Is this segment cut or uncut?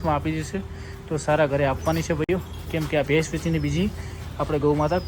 uncut